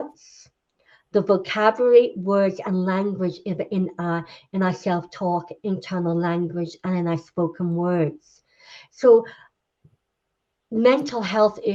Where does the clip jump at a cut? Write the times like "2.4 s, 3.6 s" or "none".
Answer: none